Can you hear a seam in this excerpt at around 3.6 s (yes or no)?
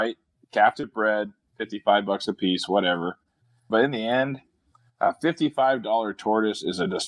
yes